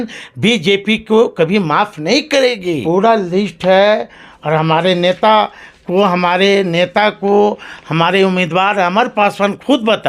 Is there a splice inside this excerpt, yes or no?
yes